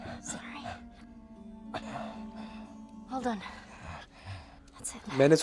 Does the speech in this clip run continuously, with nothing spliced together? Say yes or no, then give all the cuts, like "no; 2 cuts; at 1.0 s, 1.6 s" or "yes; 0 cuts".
yes; 0 cuts